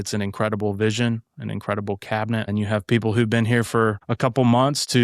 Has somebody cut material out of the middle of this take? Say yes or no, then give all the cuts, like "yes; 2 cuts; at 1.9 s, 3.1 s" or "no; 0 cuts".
yes; 2 cuts; at 2.5 s, 4.1 s